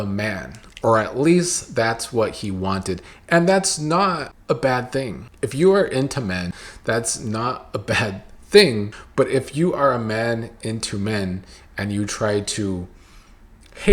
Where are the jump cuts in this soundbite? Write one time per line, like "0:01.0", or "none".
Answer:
0:06.6
0:09.0